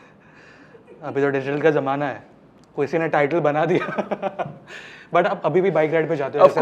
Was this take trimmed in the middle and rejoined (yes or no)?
no